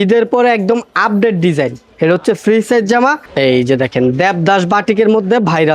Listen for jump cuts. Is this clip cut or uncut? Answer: cut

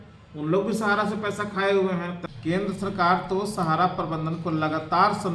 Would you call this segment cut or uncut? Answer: cut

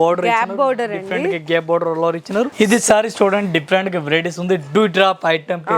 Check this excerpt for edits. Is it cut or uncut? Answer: cut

